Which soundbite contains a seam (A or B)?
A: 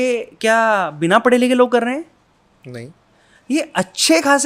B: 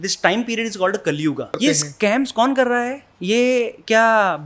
B